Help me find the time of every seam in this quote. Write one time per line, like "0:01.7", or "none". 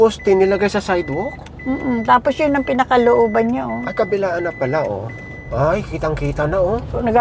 0:05.4